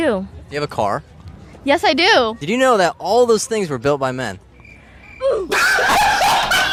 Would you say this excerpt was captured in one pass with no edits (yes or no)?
yes